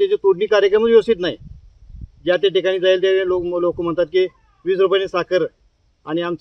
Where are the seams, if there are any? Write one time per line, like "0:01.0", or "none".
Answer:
none